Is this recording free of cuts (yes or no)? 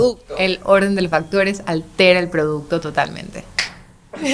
yes